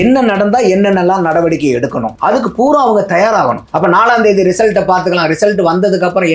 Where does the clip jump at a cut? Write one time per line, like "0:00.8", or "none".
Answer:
0:02.1
0:03.7